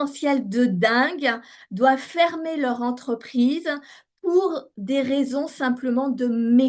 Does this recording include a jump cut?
no; 0 cuts

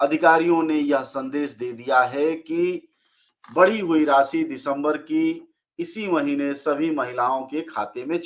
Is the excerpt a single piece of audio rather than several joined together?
yes; 0 cuts

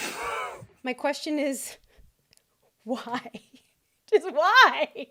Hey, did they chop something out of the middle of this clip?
no; 0 cuts

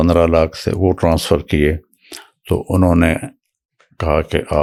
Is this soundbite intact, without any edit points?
yes; 0 cuts

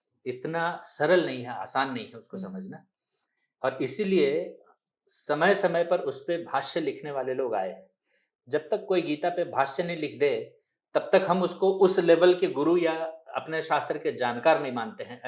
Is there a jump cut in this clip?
no; 0 cuts

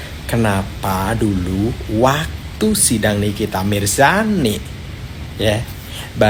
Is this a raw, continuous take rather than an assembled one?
yes; 0 cuts

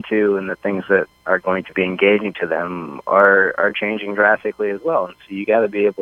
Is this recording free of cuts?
yes; 0 cuts

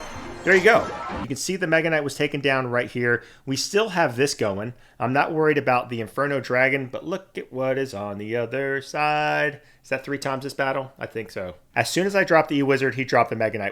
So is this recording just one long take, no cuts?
no; 2 cuts; at 1.2 s, 11.7 s

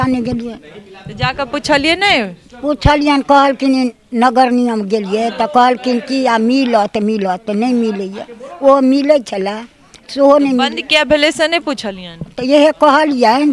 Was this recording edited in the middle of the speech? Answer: no; 0 cuts

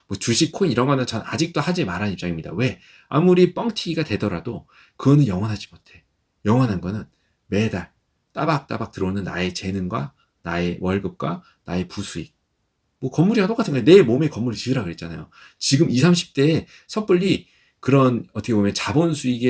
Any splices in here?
no; 0 cuts

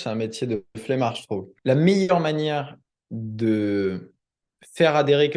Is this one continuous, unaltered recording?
no; 1 cut; at 1.4 s

